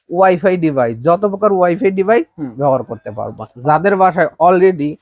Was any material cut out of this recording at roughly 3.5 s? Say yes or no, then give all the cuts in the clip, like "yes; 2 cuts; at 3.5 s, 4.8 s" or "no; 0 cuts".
yes; 1 cut; at 3.5 s